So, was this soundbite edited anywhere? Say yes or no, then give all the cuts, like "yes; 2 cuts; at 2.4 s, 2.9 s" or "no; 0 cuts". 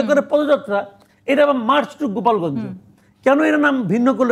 no; 0 cuts